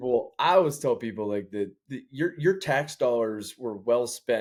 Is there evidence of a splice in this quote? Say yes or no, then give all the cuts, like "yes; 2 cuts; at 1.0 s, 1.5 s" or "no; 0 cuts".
no; 0 cuts